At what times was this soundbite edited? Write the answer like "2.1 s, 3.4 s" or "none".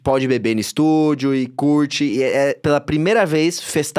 2.6 s